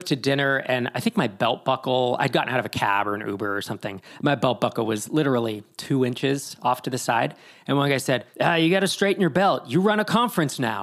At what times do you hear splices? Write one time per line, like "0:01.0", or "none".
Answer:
0:08.3